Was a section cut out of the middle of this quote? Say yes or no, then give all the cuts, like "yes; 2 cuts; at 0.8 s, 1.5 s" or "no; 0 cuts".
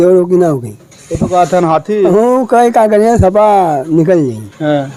no; 0 cuts